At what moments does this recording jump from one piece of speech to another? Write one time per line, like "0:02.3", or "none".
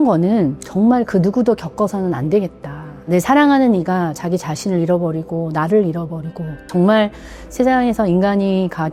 0:03.1
0:06.7